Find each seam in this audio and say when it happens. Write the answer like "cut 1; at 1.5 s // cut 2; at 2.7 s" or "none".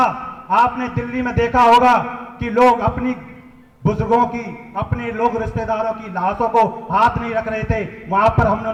none

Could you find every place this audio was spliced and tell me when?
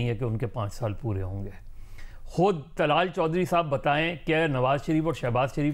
none

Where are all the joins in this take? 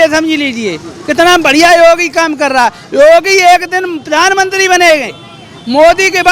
none

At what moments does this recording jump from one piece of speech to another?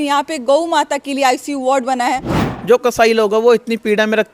cut 1; at 2.3 s

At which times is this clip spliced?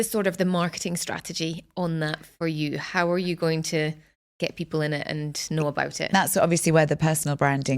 cut 1; at 6.1 s

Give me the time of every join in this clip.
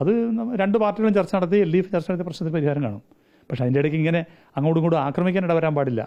none

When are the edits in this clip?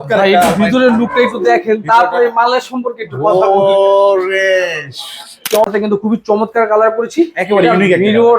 cut 1; at 5.6 s

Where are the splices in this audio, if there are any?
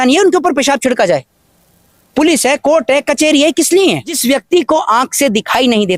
cut 1; at 4.2 s

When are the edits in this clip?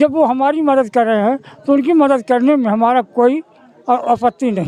none

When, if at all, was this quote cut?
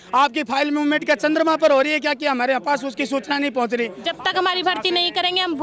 cut 1; at 4.0 s

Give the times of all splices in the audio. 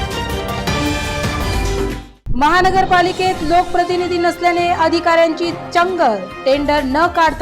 cut 1; at 2.0 s

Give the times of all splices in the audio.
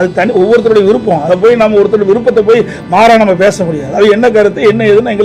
none

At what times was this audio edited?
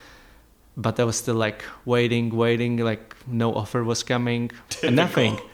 cut 1; at 4.6 s

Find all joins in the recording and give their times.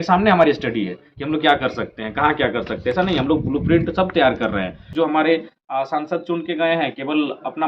cut 1; at 4.9 s

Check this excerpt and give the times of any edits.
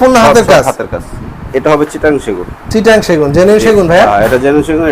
cut 1; at 1.5 s

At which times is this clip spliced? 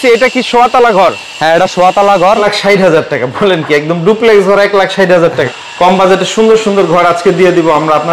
cut 1; at 2.4 s // cut 2; at 5.5 s

